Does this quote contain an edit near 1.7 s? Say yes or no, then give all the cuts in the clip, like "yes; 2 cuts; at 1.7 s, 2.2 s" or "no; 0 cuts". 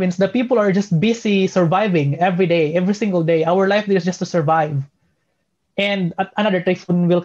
no; 0 cuts